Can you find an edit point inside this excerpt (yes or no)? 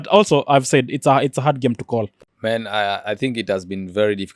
yes